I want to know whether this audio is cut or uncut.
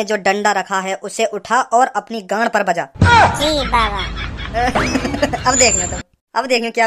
uncut